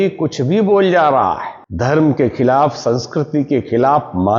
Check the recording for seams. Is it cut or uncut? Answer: uncut